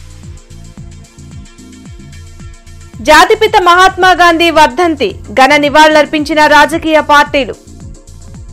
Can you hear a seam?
no; 0 cuts

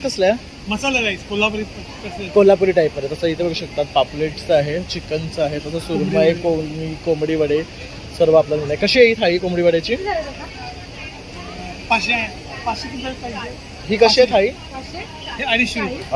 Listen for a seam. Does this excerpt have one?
no; 0 cuts

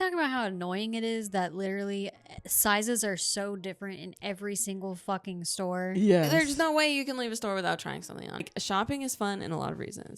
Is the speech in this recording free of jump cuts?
no; 1 cut; at 8.5 s

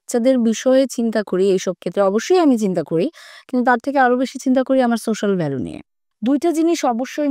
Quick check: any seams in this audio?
yes; 1 cut; at 6.1 s

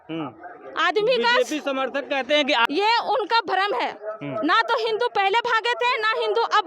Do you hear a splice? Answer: yes; 1 cut; at 2.7 s

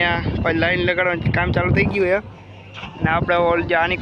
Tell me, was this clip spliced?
no; 0 cuts

